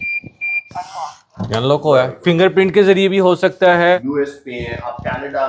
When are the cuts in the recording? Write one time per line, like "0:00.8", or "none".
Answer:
0:04.0